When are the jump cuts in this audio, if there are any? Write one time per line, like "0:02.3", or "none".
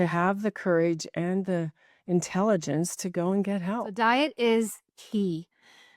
0:03.9